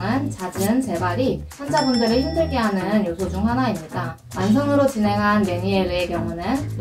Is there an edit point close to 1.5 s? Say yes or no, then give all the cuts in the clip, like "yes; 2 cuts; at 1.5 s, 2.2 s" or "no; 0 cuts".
no; 1 cut; at 4.2 s